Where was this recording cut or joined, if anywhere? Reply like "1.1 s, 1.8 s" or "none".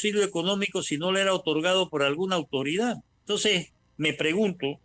3.5 s